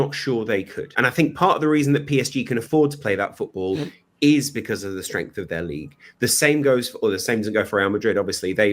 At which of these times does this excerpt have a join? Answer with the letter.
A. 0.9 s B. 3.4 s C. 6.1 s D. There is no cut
C